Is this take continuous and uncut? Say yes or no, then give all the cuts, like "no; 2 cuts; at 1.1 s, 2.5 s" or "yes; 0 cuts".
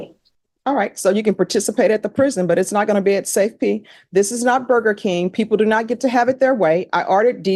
yes; 0 cuts